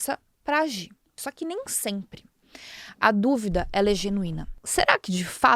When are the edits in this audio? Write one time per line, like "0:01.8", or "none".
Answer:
0:01.2
0:04.5